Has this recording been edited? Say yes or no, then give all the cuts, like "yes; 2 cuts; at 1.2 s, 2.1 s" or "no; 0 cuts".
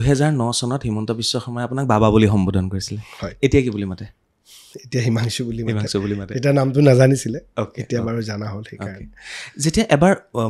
no; 0 cuts